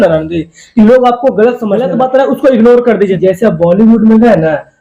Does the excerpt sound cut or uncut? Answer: cut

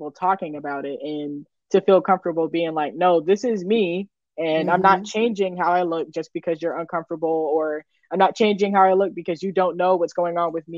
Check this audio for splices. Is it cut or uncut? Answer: uncut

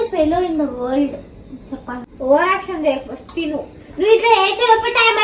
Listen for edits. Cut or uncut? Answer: cut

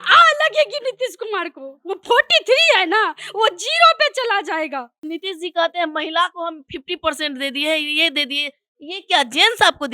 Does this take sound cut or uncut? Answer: cut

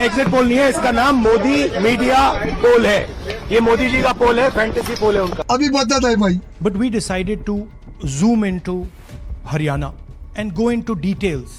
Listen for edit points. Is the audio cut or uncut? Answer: uncut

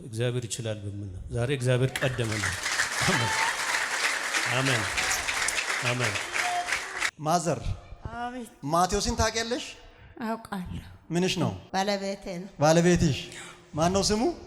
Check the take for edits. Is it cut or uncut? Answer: cut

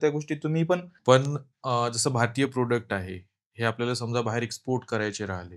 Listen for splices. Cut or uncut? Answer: cut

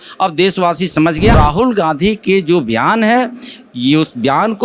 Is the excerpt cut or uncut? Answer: cut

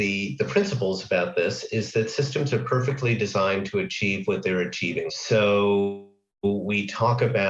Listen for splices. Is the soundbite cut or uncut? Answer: uncut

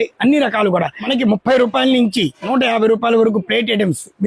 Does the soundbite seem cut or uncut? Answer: cut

